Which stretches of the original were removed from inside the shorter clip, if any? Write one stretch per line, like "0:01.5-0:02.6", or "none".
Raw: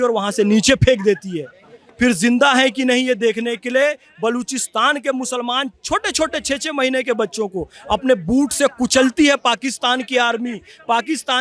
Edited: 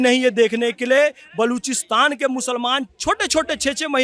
none